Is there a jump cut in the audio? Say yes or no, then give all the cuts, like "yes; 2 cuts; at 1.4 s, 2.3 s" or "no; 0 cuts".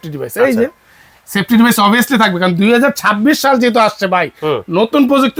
no; 0 cuts